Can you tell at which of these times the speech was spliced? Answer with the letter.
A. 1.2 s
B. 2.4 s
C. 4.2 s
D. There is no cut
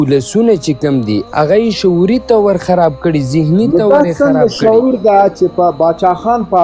A